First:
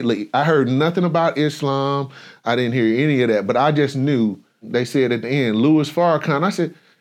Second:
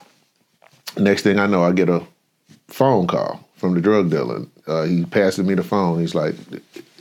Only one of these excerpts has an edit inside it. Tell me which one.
first; 1 cut; at 4.7 s

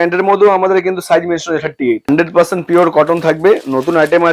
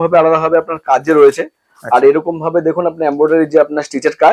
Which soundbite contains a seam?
first; 1 cut; at 2.1 s

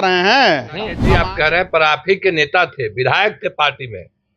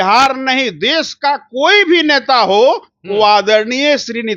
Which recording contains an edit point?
first; 1 cut; at 1.0 s

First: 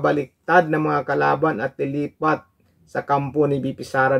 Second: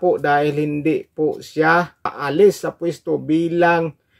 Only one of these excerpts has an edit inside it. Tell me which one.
second; 1 cut; at 2.2 s

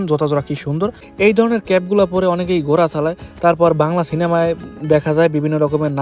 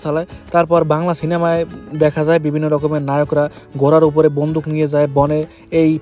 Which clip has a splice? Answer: first; 1 cut; at 1.0 s

